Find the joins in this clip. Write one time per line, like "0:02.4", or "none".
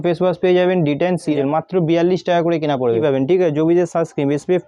0:01.3
0:03.0